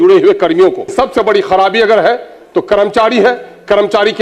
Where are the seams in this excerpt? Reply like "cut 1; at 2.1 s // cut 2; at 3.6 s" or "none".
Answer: cut 1; at 0.9 s